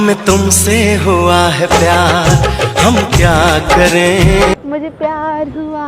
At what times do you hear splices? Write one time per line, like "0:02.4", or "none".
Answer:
0:04.5